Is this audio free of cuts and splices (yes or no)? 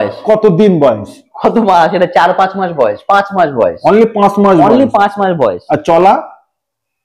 yes